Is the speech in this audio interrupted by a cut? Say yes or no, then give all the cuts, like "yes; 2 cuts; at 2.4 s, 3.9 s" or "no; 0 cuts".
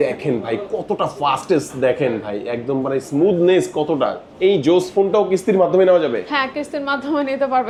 no; 0 cuts